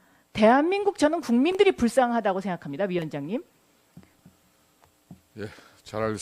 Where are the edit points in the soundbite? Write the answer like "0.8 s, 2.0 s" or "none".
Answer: 2.9 s